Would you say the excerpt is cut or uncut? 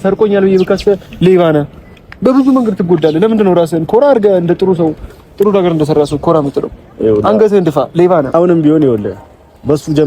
cut